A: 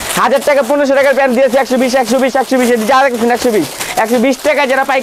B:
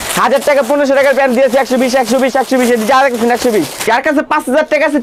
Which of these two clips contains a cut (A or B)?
B